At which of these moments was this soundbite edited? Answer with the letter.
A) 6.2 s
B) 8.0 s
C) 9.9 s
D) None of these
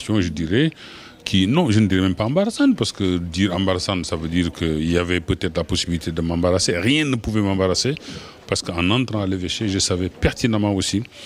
D